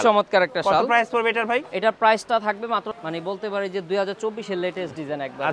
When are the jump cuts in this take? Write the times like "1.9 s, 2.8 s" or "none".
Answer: 2.9 s